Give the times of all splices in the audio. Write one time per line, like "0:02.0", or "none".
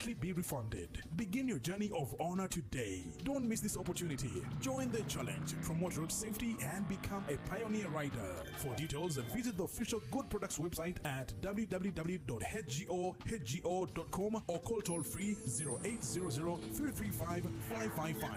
none

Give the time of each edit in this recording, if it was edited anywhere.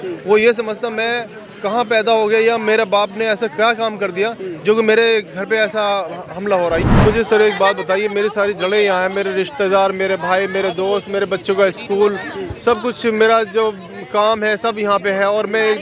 0:06.8

